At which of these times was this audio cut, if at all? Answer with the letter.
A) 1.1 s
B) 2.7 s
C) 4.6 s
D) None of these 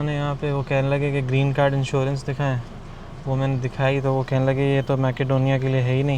D